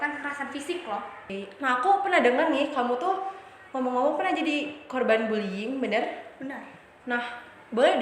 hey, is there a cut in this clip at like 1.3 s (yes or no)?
yes